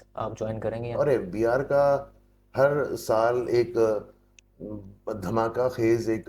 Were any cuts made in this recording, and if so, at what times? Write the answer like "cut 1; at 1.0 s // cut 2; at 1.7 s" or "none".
cut 1; at 1.0 s